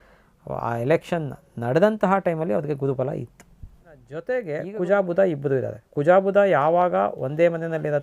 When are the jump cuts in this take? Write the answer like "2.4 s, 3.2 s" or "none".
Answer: 4.2 s